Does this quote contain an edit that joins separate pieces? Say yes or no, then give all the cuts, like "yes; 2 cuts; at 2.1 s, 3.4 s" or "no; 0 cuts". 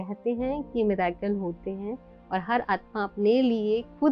no; 0 cuts